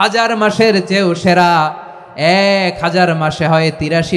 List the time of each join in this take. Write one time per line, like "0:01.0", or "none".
none